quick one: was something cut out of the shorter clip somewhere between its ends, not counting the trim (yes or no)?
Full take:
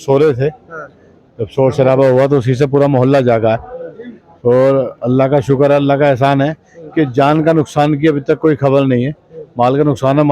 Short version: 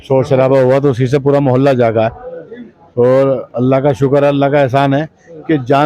no